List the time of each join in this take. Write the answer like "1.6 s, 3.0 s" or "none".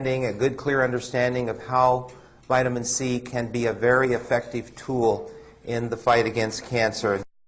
4.8 s